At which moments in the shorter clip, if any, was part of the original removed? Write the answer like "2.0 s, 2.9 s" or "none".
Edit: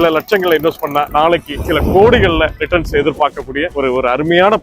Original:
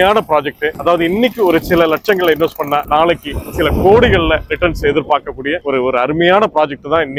1.5 s